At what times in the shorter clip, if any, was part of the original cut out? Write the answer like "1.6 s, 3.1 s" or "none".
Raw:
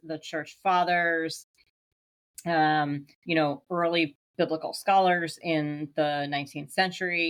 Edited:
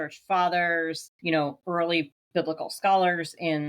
1.1 s